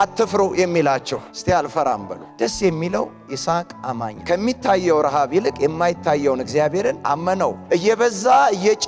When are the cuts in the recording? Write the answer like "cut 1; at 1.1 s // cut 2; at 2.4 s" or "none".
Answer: cut 1; at 2.2 s // cut 2; at 4.2 s // cut 3; at 7.6 s